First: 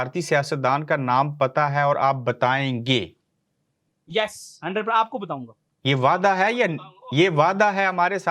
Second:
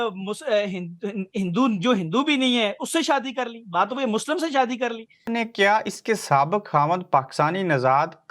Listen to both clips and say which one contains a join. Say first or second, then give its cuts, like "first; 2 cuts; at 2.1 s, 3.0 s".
second; 1 cut; at 5.3 s